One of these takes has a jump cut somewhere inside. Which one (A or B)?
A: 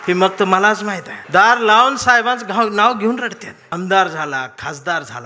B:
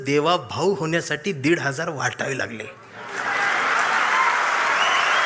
A